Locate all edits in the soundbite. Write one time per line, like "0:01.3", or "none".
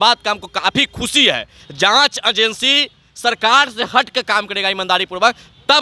0:01.6